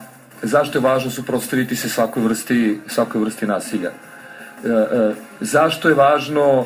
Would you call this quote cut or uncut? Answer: cut